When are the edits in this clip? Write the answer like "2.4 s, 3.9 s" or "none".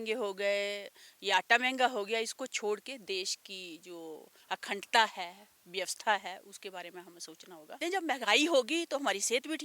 7.7 s